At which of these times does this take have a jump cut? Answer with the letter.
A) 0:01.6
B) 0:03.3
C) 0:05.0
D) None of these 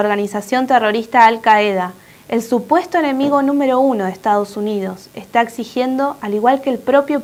D